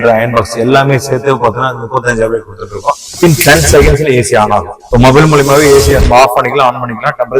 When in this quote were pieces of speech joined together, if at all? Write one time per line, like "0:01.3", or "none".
0:03.1
0:04.8